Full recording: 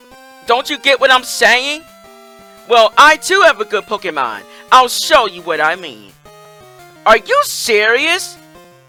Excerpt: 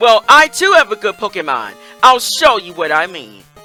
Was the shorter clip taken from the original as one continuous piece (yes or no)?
yes